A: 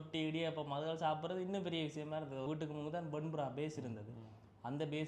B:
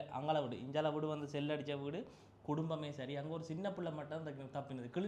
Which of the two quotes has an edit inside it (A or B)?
A